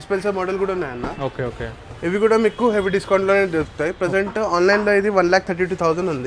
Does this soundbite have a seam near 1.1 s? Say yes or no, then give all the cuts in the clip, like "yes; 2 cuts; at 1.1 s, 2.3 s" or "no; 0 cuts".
no; 0 cuts